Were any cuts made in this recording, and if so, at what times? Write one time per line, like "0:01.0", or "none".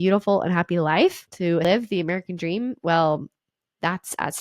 0:01.6